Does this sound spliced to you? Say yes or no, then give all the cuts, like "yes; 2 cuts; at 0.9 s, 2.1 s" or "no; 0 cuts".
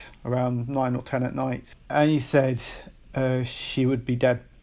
yes; 1 cut; at 1.7 s